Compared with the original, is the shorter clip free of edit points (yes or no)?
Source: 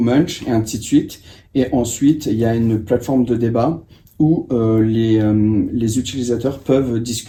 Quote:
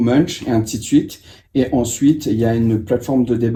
yes